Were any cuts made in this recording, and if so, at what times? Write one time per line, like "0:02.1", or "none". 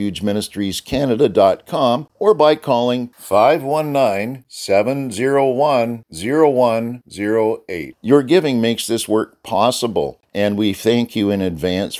0:02.1
0:10.2